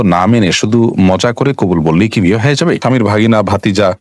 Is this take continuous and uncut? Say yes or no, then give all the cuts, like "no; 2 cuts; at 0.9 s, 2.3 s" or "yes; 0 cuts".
no; 1 cut; at 2.8 s